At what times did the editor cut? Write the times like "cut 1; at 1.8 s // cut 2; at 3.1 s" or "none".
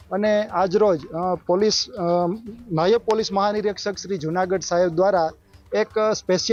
none